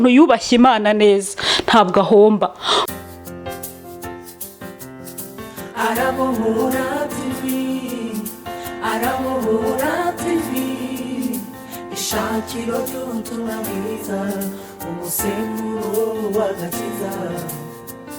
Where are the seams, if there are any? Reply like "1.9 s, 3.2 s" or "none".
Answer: 2.9 s